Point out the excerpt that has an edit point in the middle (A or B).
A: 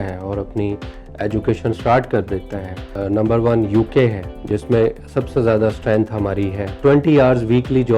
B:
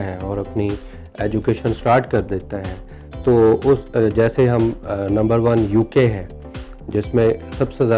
A